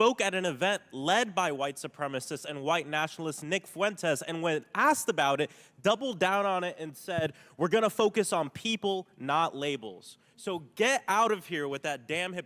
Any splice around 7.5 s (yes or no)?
no